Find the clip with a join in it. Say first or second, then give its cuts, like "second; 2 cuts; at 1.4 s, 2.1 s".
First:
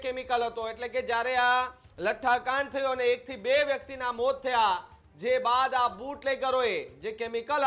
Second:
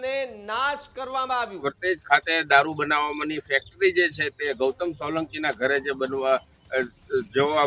second; 1 cut; at 1.6 s